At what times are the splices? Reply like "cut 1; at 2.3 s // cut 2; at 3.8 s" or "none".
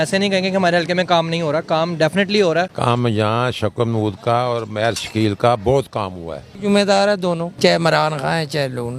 cut 1; at 2.7 s // cut 2; at 6.5 s // cut 3; at 7.5 s